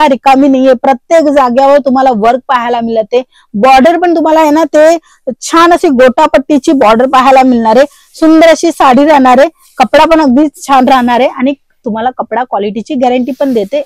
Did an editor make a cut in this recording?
no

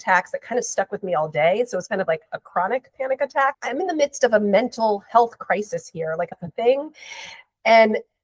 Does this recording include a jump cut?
yes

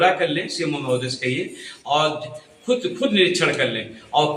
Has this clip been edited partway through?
no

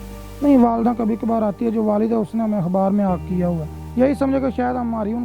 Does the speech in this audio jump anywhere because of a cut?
yes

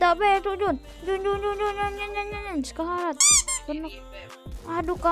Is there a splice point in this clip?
no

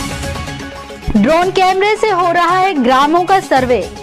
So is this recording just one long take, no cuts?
no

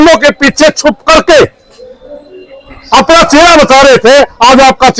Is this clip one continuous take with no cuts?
yes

